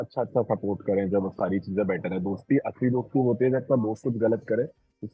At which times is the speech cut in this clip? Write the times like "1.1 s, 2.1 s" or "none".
none